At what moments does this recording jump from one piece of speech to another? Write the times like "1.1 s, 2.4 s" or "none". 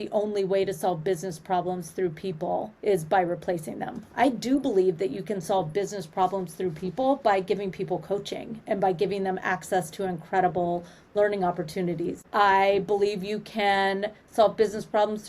2.7 s, 12.2 s